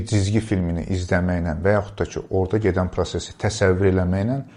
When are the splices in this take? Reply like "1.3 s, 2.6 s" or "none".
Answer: none